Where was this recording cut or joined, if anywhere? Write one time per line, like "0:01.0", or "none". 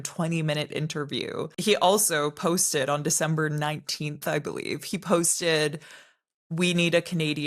0:01.5